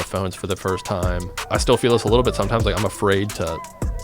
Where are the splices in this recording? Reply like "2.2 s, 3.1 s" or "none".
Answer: 1.3 s